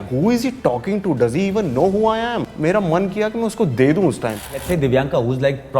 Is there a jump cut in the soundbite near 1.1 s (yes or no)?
no